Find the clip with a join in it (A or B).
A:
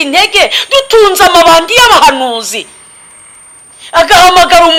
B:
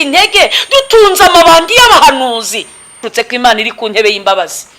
B